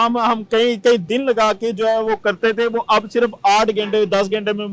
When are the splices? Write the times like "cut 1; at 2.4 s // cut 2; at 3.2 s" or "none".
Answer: cut 1; at 1.0 s